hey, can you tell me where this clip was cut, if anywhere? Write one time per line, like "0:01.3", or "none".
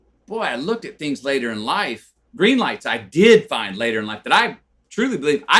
0:02.2